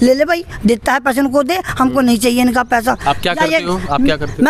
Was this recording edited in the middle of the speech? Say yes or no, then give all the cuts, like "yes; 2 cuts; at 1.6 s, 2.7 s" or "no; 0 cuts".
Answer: no; 0 cuts